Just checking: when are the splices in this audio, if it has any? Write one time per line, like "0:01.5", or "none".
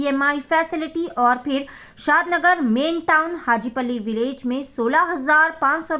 none